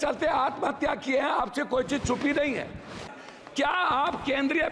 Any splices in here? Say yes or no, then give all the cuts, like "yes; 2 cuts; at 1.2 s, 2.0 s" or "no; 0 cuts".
yes; 1 cut; at 3.0 s